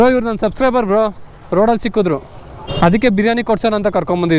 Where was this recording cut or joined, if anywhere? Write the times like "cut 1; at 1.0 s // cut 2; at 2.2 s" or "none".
none